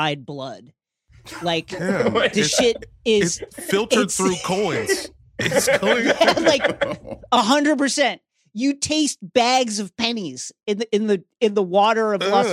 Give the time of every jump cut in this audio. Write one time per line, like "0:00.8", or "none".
none